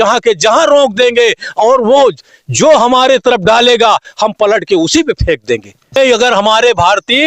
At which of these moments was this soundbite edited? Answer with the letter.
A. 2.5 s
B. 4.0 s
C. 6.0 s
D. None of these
C